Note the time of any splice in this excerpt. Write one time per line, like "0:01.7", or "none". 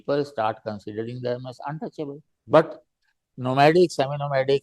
0:02.3